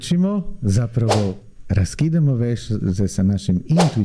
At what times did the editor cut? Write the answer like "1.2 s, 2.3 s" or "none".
none